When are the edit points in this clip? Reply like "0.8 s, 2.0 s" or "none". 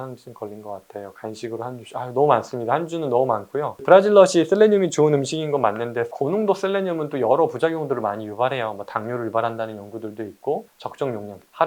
10.6 s